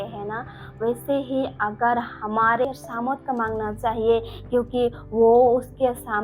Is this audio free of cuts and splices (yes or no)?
no